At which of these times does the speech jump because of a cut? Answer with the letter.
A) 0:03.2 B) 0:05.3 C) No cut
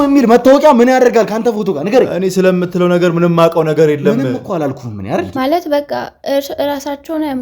B